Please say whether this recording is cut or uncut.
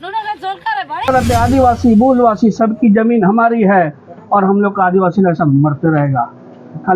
cut